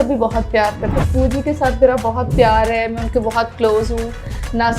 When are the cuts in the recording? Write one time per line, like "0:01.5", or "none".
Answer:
0:01.0